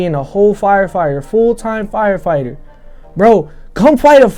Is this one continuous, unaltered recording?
yes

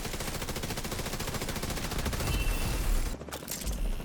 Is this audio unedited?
no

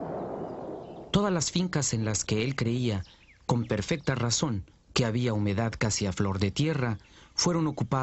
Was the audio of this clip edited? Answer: no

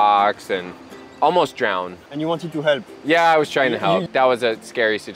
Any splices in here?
yes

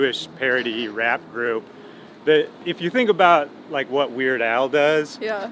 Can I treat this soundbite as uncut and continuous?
yes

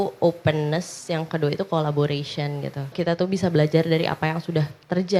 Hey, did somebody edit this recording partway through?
yes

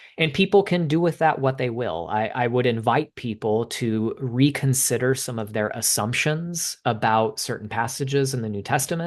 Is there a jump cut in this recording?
no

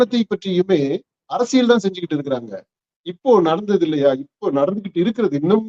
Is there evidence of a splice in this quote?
no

